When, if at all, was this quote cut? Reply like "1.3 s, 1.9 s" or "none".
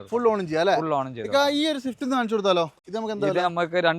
2.8 s